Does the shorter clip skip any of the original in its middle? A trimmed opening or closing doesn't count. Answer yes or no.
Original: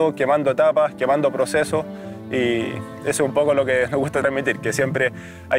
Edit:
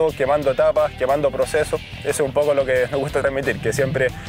yes